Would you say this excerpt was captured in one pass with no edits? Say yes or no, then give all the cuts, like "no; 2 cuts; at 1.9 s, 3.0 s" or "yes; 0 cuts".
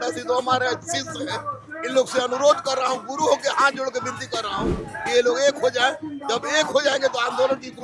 yes; 0 cuts